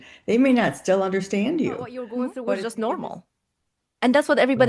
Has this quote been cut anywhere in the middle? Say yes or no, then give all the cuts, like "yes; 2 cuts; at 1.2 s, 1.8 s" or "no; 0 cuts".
yes; 1 cut; at 2.2 s